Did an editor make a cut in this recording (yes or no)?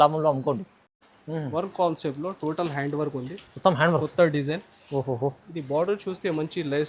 no